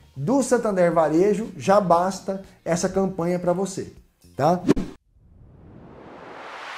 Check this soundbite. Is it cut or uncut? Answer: cut